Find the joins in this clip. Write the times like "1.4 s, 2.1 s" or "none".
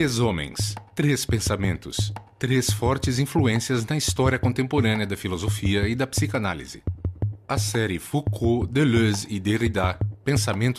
9.3 s